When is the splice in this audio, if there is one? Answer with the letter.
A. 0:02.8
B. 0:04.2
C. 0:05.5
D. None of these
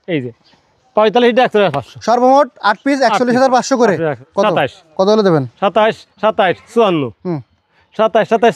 B